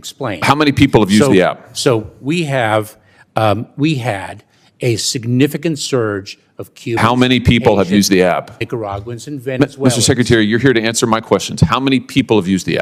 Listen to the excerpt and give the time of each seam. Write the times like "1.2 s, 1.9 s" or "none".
none